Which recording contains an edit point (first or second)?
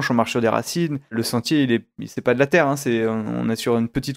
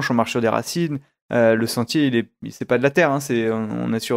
first